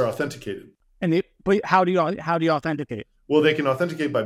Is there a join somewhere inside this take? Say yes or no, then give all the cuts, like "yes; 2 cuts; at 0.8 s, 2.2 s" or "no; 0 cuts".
yes; 1 cut; at 1.0 s